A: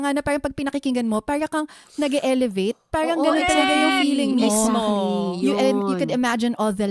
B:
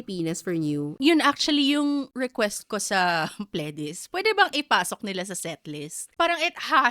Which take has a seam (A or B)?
B